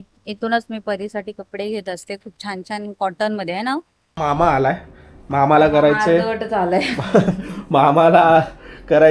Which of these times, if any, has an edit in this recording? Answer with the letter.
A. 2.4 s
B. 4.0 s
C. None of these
B